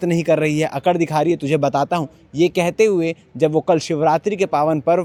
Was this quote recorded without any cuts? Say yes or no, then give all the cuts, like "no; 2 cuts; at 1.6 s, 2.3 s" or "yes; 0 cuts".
yes; 0 cuts